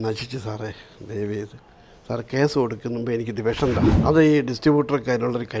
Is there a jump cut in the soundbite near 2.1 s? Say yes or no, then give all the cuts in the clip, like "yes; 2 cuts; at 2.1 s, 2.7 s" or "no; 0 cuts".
no; 1 cut; at 3.9 s